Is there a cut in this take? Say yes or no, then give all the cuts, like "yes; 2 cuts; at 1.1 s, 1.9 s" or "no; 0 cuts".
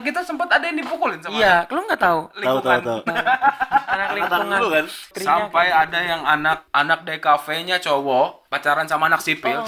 yes; 3 cuts; at 5.0 s, 6.6 s, 8.5 s